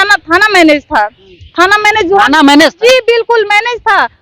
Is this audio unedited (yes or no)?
yes